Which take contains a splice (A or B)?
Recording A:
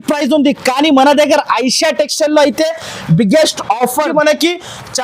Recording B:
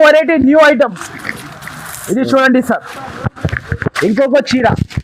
A